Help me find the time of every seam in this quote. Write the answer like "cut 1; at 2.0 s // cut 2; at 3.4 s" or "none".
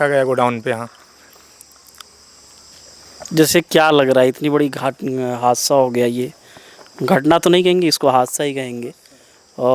none

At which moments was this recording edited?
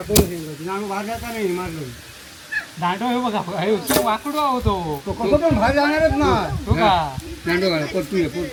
none

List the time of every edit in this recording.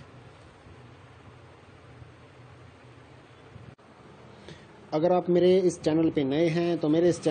none

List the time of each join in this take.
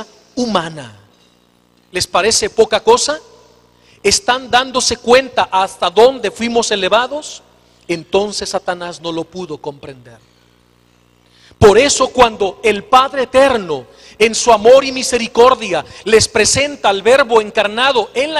cut 1; at 17.0 s

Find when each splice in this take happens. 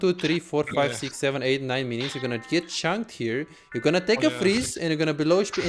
none

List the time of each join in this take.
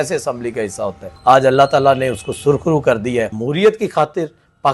cut 1; at 1.1 s // cut 2; at 3.4 s

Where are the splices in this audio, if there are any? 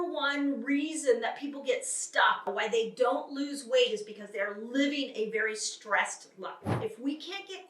cut 1; at 2.5 s // cut 2; at 6.8 s

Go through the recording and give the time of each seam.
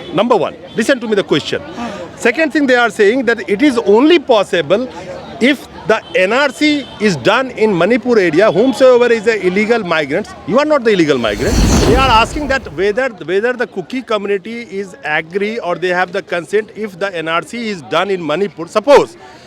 cut 1; at 11.8 s

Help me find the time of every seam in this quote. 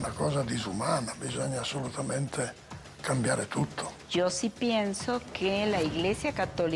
cut 1; at 3.9 s

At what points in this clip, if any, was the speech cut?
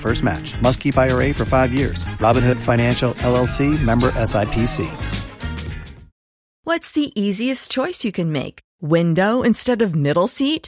cut 1; at 6.6 s

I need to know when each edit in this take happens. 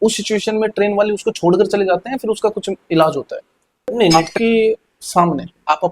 cut 1; at 4.1 s

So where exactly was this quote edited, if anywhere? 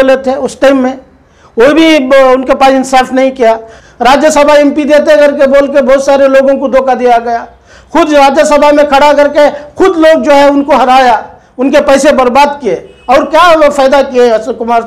cut 1; at 3.7 s

